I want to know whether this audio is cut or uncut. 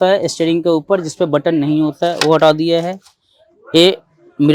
uncut